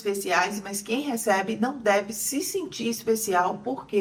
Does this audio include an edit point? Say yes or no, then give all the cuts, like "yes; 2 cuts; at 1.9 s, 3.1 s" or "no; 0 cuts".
no; 0 cuts